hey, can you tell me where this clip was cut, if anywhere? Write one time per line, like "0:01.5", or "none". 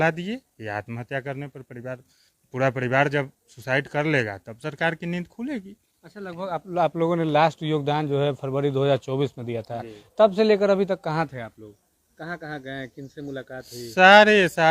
none